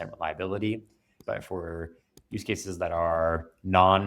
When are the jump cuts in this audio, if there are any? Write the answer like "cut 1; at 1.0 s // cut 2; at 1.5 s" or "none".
cut 1; at 1.1 s